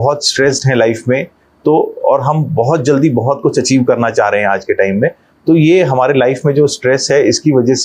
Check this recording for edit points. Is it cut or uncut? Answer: uncut